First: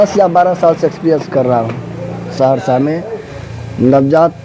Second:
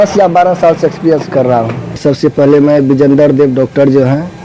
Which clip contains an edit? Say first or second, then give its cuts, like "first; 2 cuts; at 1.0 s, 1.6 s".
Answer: second; 1 cut; at 2.0 s